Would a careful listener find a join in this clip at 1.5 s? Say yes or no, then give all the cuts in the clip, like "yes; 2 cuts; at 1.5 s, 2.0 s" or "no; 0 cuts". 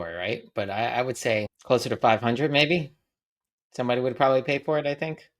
yes; 1 cut; at 1.5 s